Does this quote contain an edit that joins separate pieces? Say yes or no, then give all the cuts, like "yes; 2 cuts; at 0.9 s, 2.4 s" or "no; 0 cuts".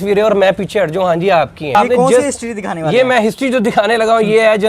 yes; 1 cut; at 1.8 s